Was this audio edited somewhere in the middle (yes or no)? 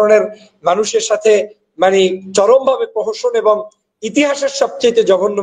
no